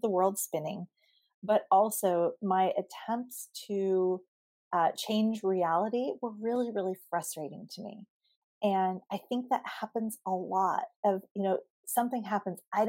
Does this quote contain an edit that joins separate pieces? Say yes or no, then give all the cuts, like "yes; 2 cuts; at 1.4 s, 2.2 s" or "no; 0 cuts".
no; 0 cuts